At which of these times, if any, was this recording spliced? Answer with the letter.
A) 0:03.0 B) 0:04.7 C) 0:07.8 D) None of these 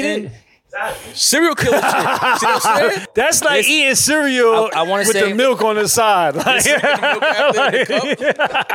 A